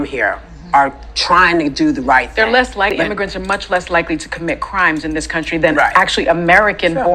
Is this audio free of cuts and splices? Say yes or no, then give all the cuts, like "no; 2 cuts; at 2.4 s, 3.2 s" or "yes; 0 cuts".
no; 1 cut; at 2.9 s